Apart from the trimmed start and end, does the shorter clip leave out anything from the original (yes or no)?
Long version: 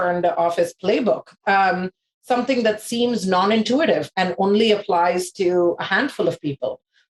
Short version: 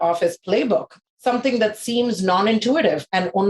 yes